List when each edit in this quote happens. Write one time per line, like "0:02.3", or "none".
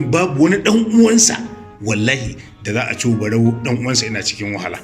none